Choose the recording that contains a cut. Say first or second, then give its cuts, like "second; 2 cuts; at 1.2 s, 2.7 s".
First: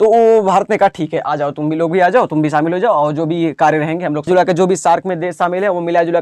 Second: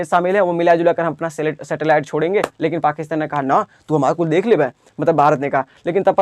first; 1 cut; at 4.3 s